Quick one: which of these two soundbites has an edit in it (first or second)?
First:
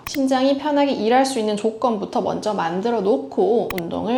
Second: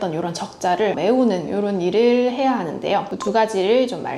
second